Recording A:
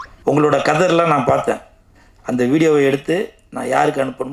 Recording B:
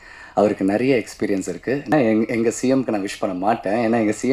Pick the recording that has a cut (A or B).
B